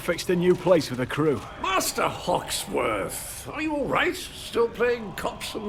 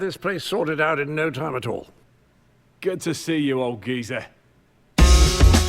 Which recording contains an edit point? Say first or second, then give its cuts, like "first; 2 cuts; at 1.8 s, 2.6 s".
second; 1 cut; at 1.1 s